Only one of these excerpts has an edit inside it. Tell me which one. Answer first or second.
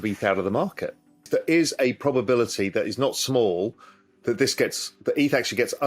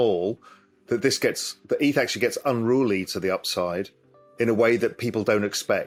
first